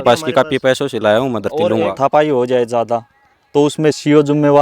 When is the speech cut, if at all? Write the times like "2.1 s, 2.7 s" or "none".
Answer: 1.9 s